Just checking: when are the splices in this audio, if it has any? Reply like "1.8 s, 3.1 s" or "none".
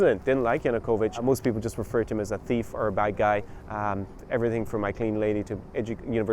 1.2 s